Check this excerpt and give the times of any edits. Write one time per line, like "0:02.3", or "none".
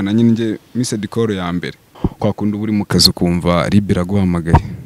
0:02.0